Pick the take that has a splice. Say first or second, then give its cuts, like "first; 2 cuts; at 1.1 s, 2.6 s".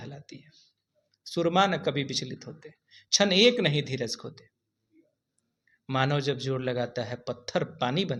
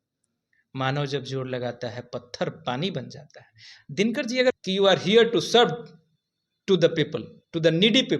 second; 1 cut; at 4.6 s